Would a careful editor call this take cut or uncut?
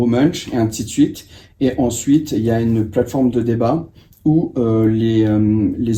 uncut